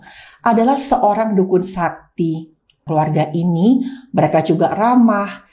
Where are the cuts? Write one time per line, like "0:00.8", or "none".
0:02.9